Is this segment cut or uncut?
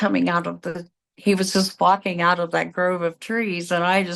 uncut